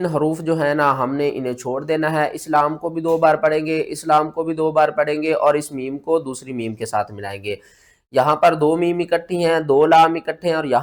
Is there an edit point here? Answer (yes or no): no